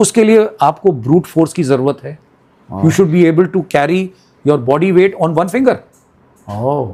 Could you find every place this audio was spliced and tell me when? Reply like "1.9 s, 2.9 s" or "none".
none